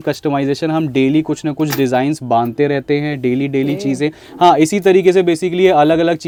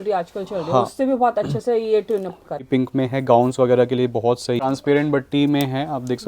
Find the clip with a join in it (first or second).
second